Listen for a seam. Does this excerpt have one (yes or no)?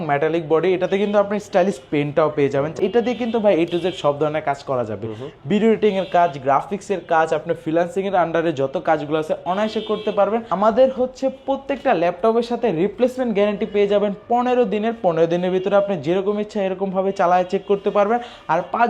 yes